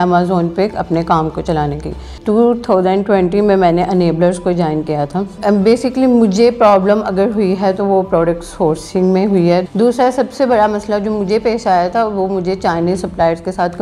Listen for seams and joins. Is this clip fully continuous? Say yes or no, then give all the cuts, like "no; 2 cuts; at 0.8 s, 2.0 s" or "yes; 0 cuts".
no; 3 cuts; at 2.2 s, 5.4 s, 9.7 s